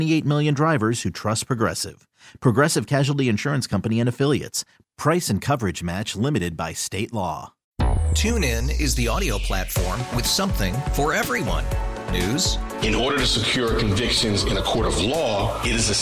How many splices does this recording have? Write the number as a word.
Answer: one